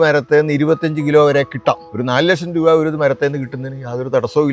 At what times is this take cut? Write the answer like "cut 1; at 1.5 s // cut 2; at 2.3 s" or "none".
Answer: cut 1; at 1.8 s

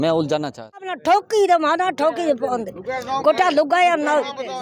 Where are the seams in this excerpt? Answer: cut 1; at 0.9 s

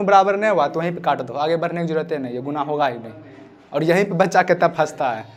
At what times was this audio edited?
none

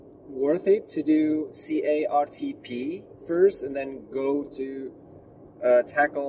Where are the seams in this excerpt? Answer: none

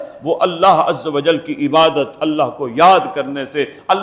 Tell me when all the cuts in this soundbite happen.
none

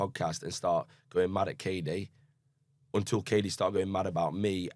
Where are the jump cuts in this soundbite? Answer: none

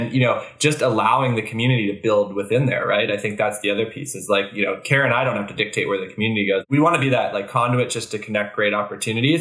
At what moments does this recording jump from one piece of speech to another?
cut 1; at 6.7 s

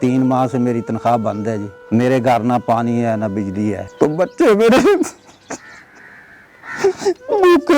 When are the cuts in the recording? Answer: cut 1; at 1.7 s // cut 2; at 3.8 s

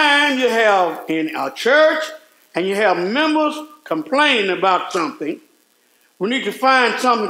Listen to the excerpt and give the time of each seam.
none

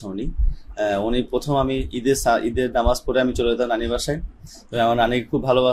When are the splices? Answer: none

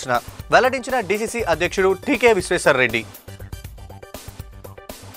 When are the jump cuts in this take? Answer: none

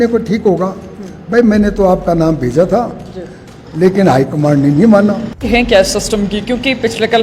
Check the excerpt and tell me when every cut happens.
cut 1; at 5.4 s

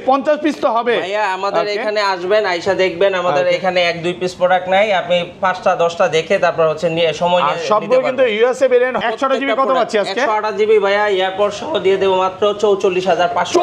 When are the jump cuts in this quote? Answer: cut 1; at 9.0 s

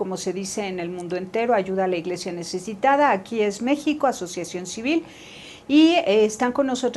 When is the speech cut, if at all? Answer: none

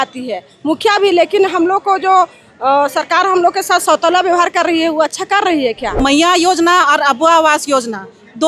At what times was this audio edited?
cut 1; at 6.0 s

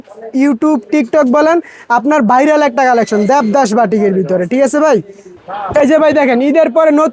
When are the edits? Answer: cut 1; at 5.4 s

